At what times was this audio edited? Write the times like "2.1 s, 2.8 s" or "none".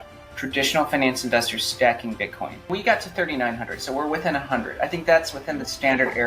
2.5 s